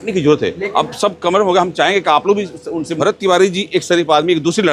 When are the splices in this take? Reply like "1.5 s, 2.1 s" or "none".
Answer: 2.9 s